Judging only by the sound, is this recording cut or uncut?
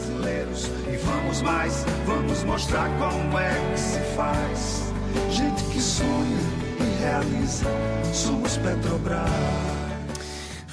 uncut